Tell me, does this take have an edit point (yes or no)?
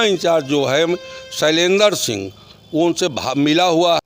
no